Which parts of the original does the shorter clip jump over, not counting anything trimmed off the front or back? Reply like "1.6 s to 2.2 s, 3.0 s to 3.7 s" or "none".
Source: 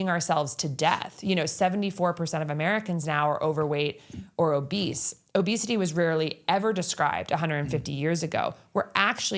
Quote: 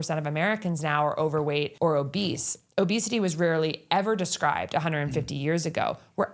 4.0 s to 4.3 s